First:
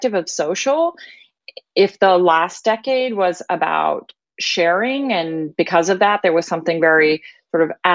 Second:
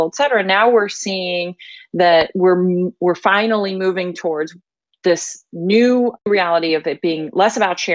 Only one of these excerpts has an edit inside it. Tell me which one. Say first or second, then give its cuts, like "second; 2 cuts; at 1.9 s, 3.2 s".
second; 1 cut; at 6.3 s